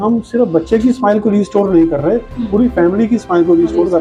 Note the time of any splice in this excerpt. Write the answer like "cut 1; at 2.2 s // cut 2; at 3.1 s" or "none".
none